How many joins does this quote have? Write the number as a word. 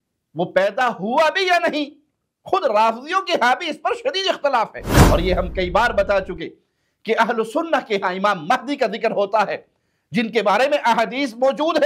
one